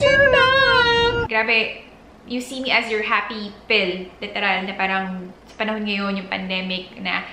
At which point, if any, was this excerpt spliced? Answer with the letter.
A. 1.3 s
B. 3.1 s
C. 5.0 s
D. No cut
A